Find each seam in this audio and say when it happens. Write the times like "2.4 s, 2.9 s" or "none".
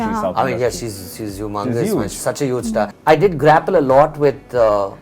2.9 s

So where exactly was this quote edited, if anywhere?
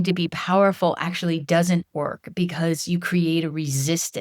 none

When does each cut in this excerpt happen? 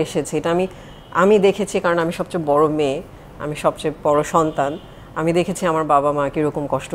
none

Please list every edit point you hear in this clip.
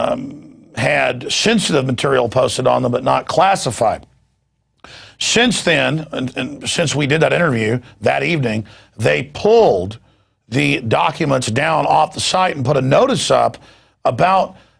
3.4 s

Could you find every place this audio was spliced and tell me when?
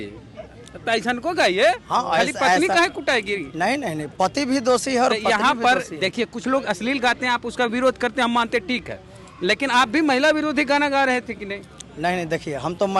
none

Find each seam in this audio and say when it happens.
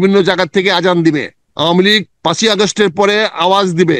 1.4 s

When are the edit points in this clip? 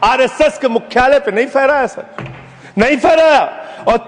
none

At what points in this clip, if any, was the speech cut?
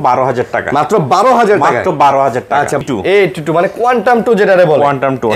2.8 s

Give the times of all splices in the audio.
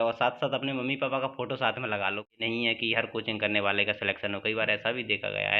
2.4 s

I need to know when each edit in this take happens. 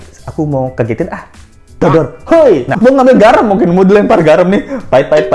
2.8 s

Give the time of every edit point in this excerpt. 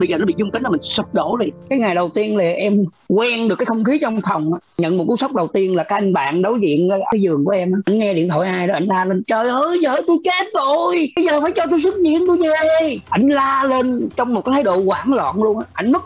1.6 s

